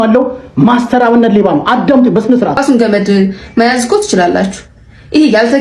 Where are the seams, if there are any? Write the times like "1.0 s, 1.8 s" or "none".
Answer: 2.6 s